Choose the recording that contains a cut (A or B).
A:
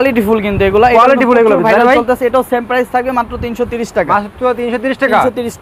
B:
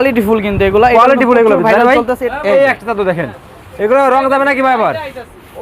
B